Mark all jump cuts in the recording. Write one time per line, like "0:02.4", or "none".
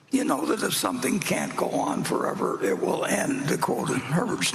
none